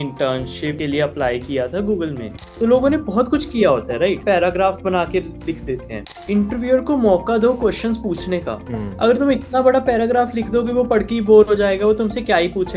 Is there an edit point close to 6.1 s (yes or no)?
yes